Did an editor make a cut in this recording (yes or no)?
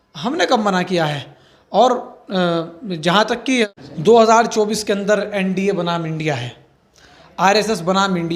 yes